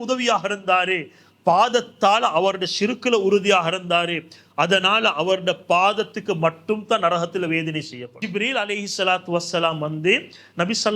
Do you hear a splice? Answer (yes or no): yes